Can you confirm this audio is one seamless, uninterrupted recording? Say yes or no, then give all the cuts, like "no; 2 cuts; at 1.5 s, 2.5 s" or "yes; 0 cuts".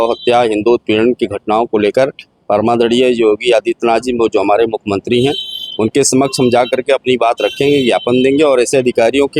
yes; 0 cuts